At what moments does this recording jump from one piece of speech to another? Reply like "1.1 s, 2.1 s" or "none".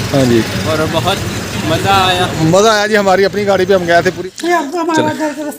4.2 s

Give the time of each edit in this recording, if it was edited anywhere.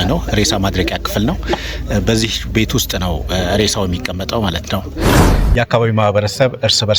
5.1 s

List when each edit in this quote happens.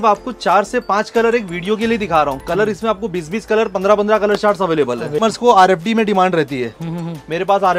5.2 s

